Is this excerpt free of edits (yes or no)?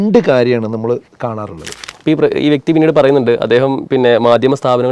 no